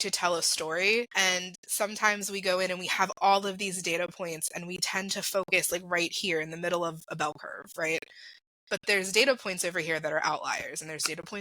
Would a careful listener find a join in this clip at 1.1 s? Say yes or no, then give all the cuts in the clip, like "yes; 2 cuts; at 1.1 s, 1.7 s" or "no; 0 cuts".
yes; 1 cut; at 1.1 s